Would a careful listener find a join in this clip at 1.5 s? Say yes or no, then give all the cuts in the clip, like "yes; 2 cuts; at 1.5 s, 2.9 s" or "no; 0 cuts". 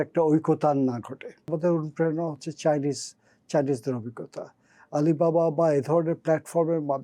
yes; 1 cut; at 1.5 s